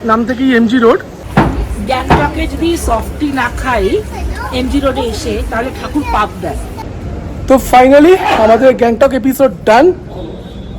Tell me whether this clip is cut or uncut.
cut